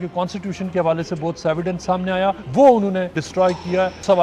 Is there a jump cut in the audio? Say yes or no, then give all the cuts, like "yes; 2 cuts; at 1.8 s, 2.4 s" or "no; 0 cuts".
yes; 2 cuts; at 2.4 s, 3.2 s